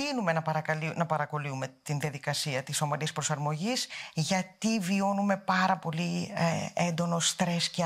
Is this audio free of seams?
yes; 0 cuts

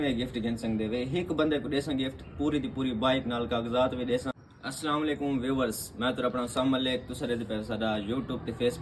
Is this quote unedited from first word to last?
yes; 0 cuts

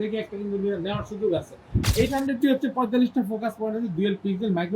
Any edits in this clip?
yes; 1 cut; at 1.9 s

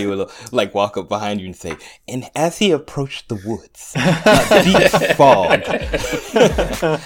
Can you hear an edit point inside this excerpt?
no; 0 cuts

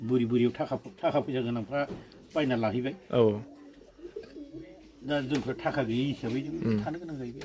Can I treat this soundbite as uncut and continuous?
yes; 0 cuts

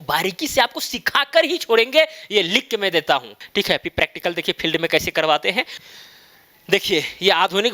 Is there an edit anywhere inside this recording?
yes; 2 cuts; at 3.3 s, 5.7 s

